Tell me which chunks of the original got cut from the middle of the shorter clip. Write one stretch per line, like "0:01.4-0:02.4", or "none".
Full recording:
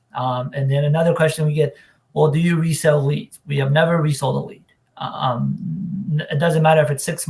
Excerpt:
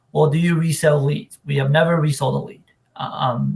none

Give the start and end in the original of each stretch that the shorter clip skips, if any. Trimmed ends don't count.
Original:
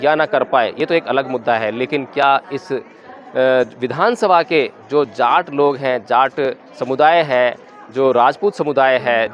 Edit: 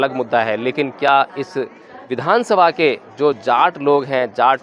0:03.2-0:03.8

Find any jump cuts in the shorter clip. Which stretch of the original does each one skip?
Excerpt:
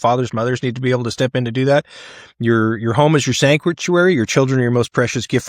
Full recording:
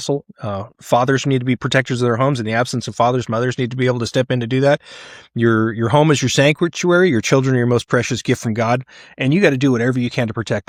none

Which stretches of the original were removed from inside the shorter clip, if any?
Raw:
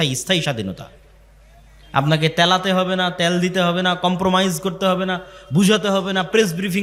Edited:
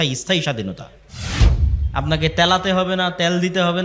none

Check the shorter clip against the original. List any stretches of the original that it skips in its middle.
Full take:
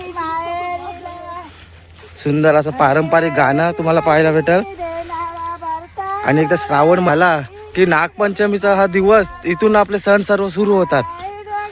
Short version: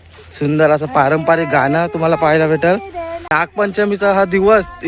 0:05.2-0:07.9

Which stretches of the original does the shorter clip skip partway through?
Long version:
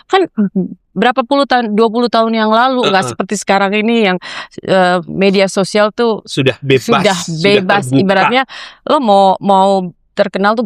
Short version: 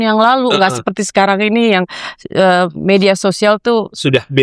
none

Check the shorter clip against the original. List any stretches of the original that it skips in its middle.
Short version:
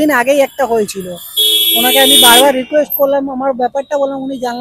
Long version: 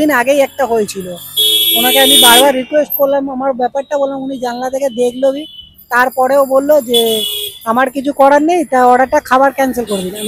none

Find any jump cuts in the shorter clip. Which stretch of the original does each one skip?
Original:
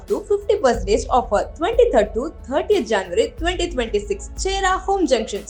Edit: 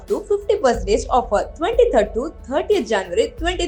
none

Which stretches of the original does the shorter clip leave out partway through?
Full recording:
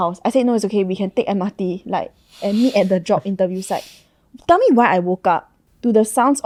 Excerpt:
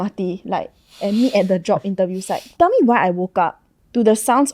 0:03.8-0:04.2

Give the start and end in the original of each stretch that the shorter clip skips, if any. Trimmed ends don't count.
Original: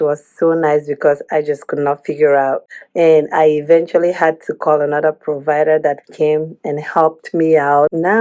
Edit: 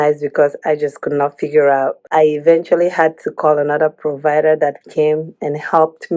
0:02.7-0:03.3

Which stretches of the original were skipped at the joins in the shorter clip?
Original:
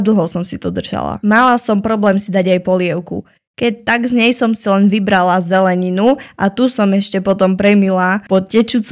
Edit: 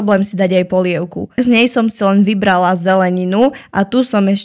0:03.3-0:04.0

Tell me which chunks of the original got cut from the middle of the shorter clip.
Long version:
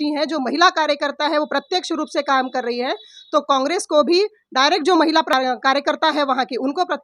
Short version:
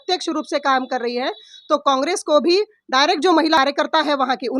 0:05.2-0:05.7

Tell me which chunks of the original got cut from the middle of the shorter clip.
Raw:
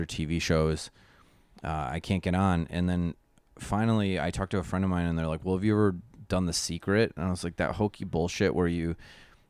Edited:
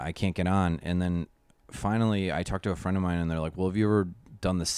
none

